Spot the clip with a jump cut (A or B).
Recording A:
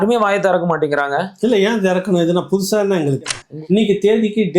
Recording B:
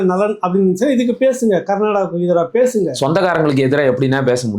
A